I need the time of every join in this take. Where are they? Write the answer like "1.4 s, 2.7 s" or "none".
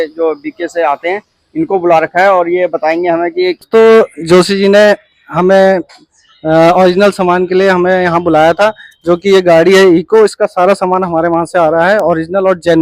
3.6 s